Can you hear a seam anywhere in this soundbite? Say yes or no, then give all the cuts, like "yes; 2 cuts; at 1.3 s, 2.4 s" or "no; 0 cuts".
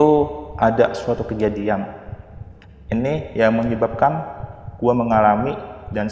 no; 0 cuts